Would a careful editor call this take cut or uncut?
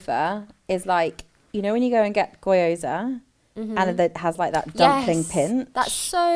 uncut